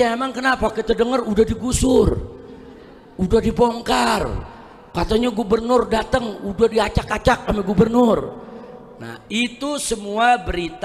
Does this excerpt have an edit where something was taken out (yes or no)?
no